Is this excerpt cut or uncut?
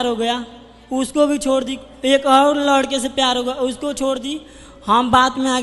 uncut